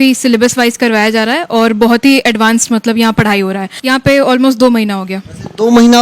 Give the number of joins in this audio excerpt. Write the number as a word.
one